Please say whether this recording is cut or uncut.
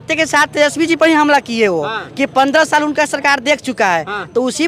uncut